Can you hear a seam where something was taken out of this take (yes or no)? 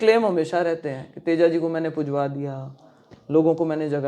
no